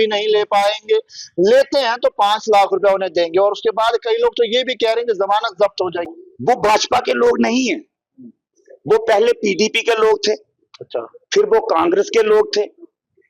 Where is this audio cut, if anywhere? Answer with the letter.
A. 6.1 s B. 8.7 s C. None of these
A